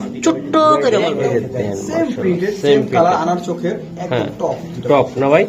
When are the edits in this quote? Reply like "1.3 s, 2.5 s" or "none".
1.2 s